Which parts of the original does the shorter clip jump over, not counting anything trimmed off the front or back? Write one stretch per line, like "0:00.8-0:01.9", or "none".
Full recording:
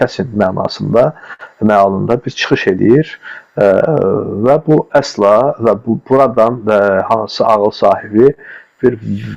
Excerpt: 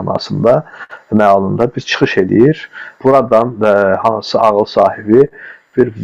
0:03.4-0:05.9